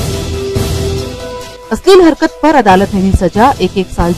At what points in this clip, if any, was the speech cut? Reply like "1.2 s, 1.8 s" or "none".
1.5 s